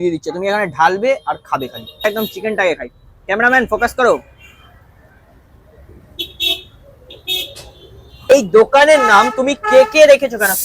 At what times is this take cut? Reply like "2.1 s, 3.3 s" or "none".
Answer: 2.0 s, 8.3 s